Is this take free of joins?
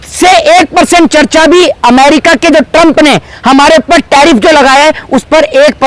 yes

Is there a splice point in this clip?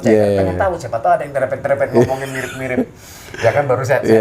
no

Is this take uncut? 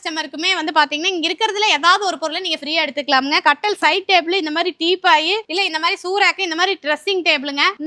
yes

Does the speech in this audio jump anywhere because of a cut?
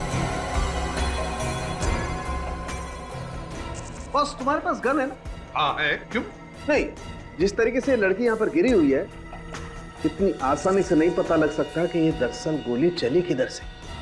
no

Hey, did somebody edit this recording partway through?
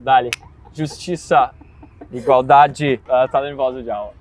yes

